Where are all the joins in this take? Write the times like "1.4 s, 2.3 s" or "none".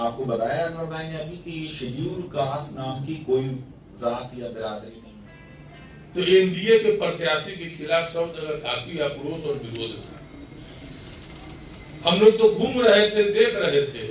5.0 s